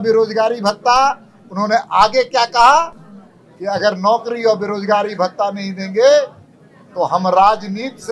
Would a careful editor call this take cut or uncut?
uncut